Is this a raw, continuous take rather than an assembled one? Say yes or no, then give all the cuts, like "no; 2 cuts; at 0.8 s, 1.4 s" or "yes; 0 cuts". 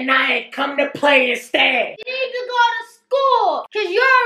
yes; 0 cuts